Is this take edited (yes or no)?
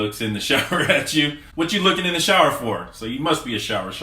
yes